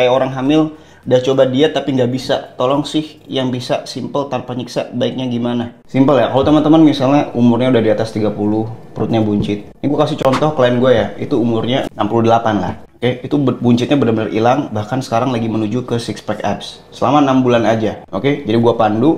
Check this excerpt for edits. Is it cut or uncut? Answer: uncut